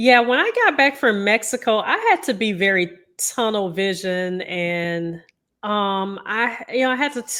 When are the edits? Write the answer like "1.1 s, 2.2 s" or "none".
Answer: none